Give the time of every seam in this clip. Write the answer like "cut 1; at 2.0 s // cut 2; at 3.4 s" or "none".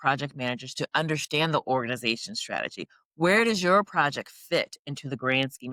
none

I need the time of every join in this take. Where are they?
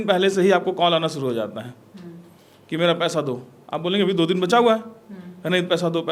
none

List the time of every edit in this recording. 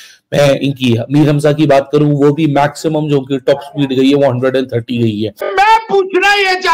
cut 1; at 5.5 s

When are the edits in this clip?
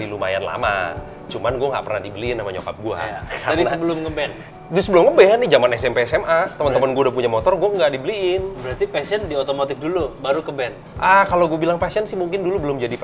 none

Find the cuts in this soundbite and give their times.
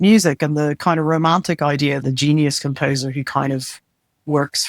cut 1; at 2.0 s

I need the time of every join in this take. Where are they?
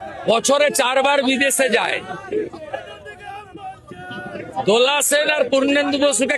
none

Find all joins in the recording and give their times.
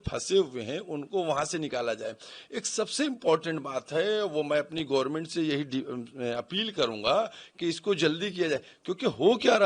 none

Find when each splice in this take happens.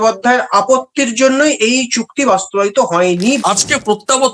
cut 1; at 3.4 s

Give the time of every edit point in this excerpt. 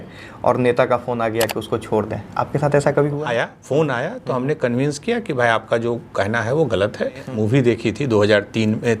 cut 1; at 3.2 s // cut 2; at 7.3 s

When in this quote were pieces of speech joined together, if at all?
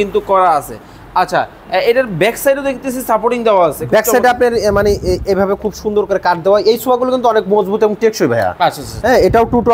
none

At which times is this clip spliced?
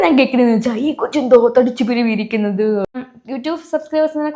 cut 1; at 2.9 s

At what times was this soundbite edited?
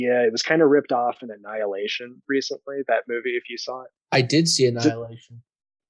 none

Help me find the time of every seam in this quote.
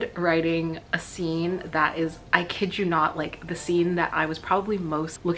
none

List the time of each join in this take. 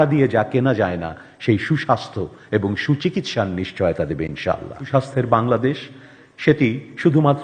cut 1; at 4.9 s

